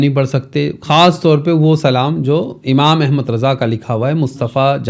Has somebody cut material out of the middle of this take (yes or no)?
no